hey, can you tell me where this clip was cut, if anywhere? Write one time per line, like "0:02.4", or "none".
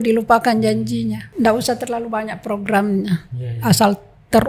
0:01.2